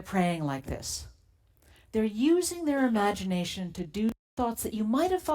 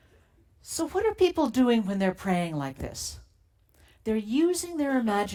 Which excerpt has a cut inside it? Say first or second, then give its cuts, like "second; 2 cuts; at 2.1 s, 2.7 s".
first; 1 cut; at 4.2 s